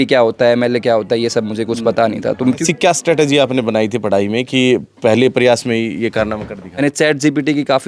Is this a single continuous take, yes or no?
no